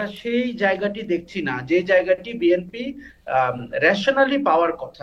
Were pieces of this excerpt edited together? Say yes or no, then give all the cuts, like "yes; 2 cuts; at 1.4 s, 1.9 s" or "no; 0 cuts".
no; 0 cuts